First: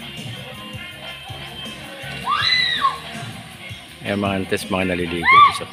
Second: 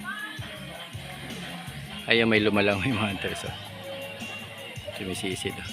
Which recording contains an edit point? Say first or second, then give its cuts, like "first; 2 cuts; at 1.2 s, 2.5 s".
second; 1 cut; at 1.9 s